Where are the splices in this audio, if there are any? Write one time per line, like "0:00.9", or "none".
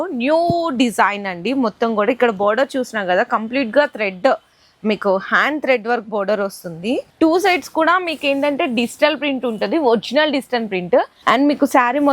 0:07.1
0:11.1